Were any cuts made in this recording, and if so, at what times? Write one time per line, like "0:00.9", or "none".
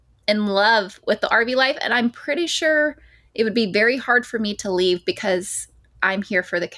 none